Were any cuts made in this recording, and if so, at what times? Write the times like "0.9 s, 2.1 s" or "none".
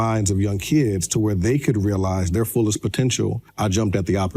3.4 s